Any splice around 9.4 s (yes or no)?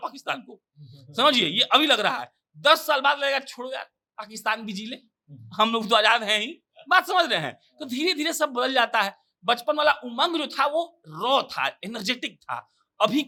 no